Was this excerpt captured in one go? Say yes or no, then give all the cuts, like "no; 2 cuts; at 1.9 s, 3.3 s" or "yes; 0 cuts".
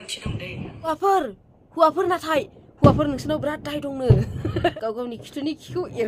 no; 2 cuts; at 0.9 s, 4.7 s